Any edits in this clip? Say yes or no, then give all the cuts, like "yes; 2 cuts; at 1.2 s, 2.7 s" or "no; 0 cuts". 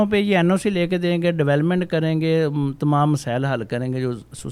no; 0 cuts